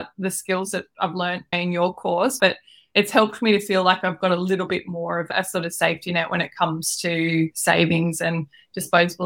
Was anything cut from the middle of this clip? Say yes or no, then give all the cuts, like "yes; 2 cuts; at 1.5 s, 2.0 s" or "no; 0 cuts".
yes; 1 cut; at 2.4 s